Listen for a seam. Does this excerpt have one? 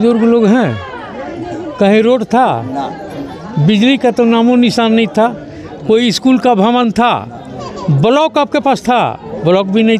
no; 0 cuts

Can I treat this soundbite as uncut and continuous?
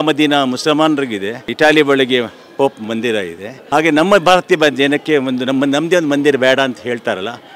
yes; 0 cuts

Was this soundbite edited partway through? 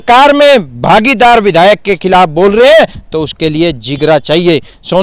no; 0 cuts

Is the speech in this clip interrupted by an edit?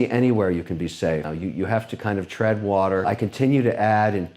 yes; 2 cuts; at 1.3 s, 3.0 s

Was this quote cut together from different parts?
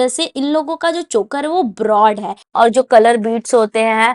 yes; 1 cut; at 2.3 s

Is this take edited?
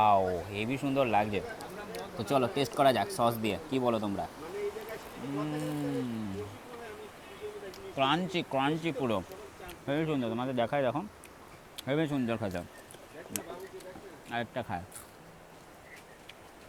no; 0 cuts

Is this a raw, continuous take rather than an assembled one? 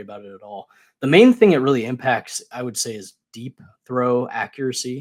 yes; 0 cuts

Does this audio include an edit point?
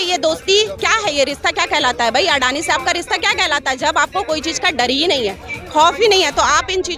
no; 0 cuts

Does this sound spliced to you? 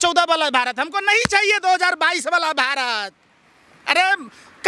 no; 0 cuts

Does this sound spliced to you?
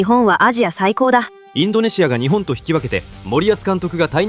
yes; 1 cut; at 1.4 s

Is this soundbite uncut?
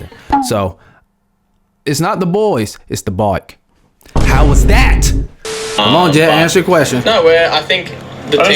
no; 2 cuts; at 1.7 s, 5.7 s

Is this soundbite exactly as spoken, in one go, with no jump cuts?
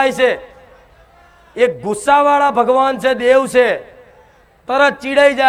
yes; 0 cuts

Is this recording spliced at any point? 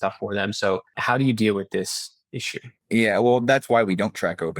yes; 2 cuts; at 1.0 s, 2.7 s

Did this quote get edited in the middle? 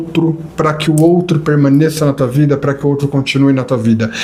no; 0 cuts

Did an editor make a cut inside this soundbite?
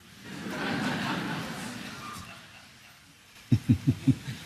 yes; 1 cut; at 3.3 s

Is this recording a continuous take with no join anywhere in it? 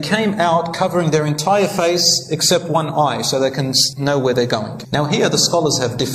no; 2 cuts; at 3.8 s, 4.8 s

